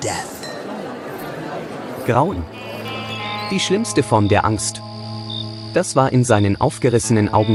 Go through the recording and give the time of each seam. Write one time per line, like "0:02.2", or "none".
none